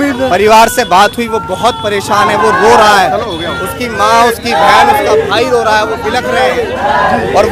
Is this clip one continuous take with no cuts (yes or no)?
yes